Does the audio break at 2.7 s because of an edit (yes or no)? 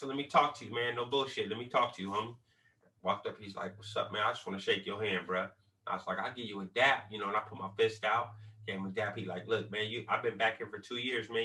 no